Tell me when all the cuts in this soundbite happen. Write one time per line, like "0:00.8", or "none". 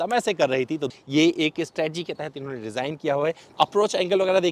0:00.9
0:03.4